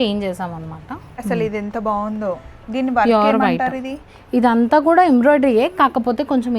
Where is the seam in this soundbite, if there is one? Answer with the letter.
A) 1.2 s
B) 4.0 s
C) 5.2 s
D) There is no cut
A